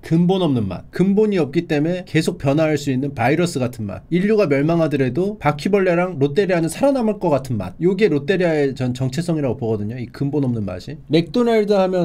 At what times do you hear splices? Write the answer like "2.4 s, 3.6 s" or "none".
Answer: none